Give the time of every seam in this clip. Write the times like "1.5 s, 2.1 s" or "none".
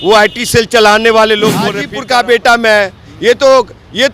1.9 s

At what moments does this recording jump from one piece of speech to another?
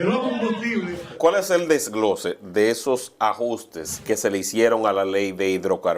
1.2 s, 4.0 s

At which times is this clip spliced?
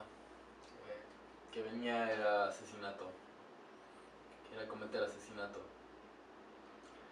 none

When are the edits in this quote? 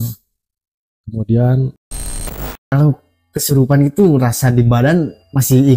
2.0 s

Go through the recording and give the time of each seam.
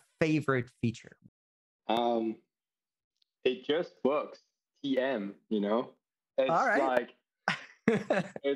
1.1 s

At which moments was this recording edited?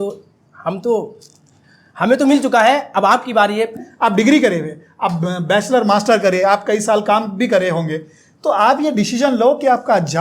3.8 s

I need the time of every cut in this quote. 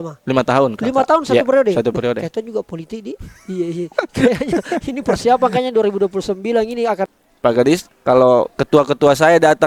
7.1 s, 7.9 s

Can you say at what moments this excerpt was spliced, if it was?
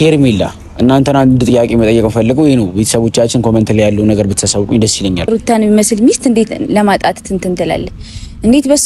5.3 s

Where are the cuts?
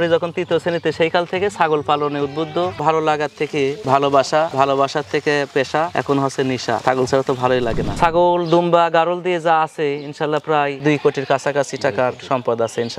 2.7 s, 7.9 s

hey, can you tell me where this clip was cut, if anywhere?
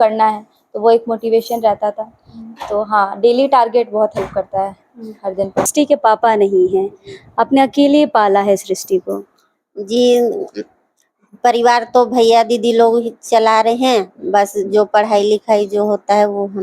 5.7 s

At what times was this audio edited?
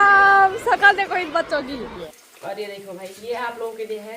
2.0 s

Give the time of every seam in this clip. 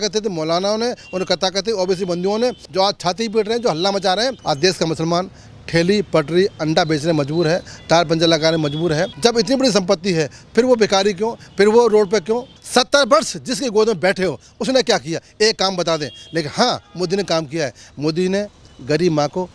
2.6 s, 4.4 s, 9.1 s, 12.5 s

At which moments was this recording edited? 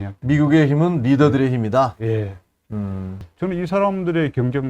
3.3 s

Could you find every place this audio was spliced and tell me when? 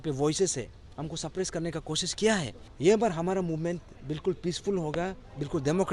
2.6 s

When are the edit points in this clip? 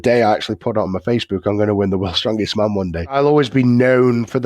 3.1 s

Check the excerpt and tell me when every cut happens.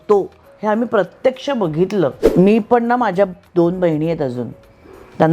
2.2 s

